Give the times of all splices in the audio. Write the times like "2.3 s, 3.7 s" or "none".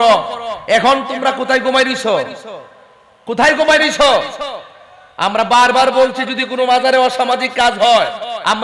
none